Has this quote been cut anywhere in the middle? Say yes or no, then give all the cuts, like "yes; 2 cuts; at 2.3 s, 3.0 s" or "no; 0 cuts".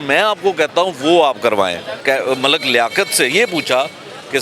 yes; 1 cut; at 1.9 s